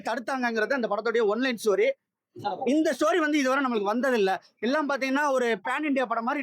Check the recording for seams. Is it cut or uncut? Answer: uncut